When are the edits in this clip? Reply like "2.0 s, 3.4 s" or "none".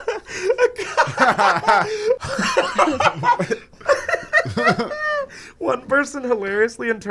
2.2 s